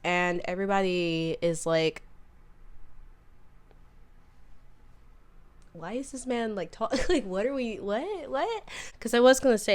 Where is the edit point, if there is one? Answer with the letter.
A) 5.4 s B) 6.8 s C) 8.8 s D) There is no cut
C